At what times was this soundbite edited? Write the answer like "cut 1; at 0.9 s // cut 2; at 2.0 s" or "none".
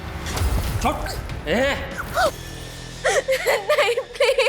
cut 1; at 2.0 s